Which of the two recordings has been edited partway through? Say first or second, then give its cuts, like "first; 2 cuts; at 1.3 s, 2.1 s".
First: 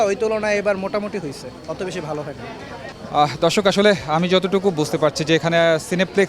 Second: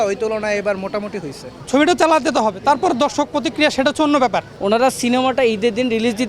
second; 2 cuts; at 1.5 s, 4.5 s